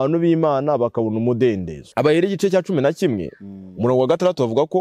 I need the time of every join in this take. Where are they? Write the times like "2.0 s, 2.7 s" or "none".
1.9 s